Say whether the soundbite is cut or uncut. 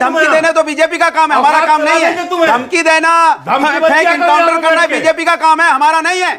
uncut